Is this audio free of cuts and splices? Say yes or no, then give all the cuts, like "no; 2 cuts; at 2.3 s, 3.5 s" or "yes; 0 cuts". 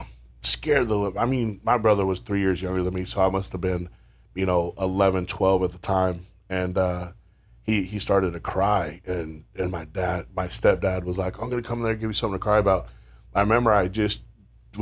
yes; 0 cuts